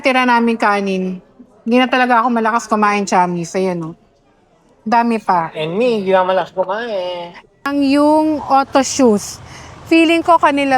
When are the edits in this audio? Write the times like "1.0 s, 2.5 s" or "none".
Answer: 7.7 s